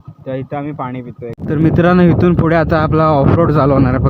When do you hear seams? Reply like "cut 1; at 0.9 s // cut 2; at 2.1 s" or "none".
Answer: cut 1; at 1.4 s